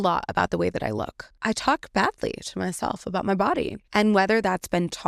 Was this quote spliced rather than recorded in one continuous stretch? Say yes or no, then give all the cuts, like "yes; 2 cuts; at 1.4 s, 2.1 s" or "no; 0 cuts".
yes; 2 cuts; at 1.2 s, 3.8 s